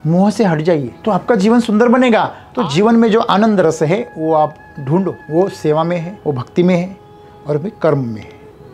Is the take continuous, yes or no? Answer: no